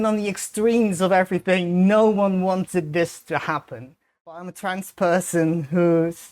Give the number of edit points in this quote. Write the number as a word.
one